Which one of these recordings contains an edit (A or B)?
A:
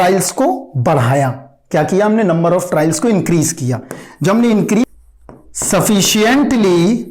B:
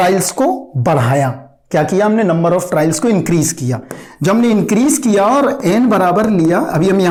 A